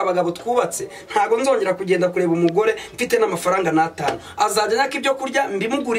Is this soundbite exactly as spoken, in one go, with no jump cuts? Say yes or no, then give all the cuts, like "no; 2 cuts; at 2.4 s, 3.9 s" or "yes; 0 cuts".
yes; 0 cuts